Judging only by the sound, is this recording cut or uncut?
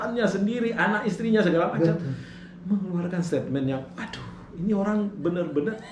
uncut